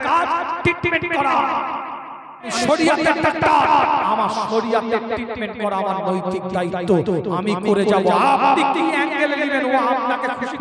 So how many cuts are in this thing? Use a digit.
1